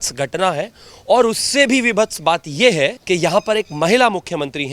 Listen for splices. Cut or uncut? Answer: cut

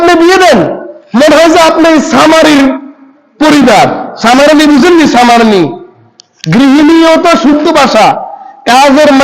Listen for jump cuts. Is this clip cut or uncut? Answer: uncut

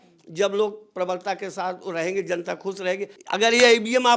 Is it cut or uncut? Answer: cut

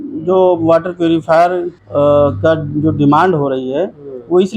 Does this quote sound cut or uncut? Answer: cut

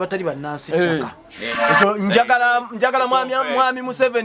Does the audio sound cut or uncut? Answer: cut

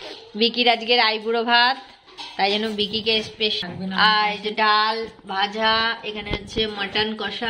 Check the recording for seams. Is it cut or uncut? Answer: cut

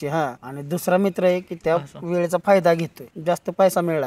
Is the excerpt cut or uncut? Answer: cut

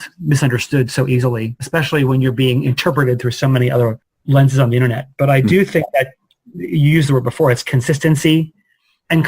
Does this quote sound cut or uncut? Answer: cut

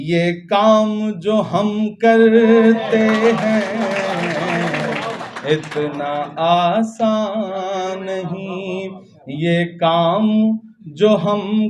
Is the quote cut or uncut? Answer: uncut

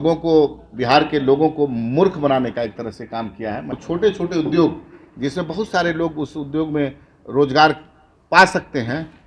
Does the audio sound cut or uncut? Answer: cut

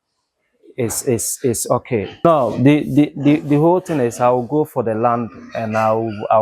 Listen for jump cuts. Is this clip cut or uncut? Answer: cut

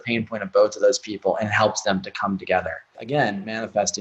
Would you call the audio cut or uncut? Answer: cut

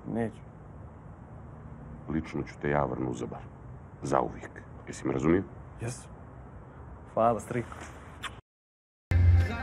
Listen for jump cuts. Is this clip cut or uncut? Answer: cut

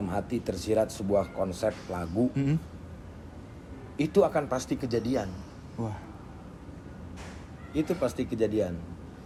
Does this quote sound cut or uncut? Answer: uncut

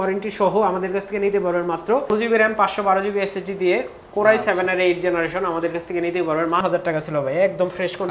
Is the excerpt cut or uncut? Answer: cut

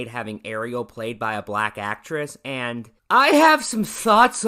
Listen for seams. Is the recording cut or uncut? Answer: uncut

